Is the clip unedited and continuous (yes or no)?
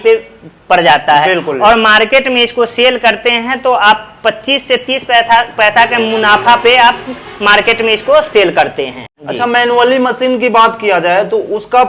no